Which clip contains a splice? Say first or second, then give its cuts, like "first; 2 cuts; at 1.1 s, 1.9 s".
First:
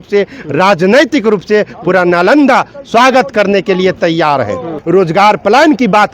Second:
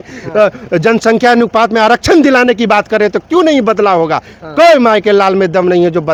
first; 1 cut; at 4.7 s